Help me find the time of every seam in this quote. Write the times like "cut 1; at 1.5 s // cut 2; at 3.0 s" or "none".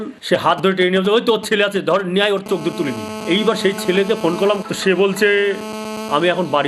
none